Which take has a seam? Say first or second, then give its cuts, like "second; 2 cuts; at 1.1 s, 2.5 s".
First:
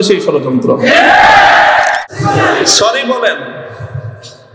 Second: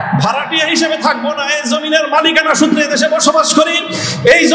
first; 1 cut; at 2.0 s